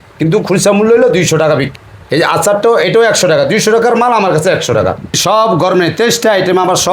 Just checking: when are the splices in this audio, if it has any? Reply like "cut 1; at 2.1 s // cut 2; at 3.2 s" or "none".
cut 1; at 1.7 s // cut 2; at 5.2 s